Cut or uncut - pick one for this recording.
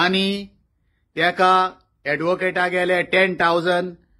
uncut